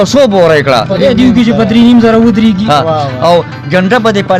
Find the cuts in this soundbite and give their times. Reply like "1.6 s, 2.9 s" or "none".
none